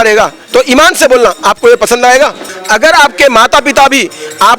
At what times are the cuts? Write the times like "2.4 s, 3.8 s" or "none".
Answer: 2.5 s